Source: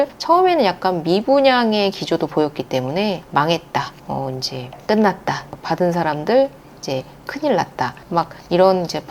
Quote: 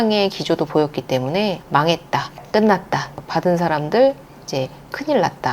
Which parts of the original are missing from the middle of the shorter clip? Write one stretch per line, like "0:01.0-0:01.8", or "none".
0:04.0-0:04.7